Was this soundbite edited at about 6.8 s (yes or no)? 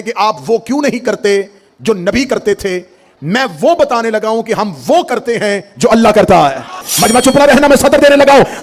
yes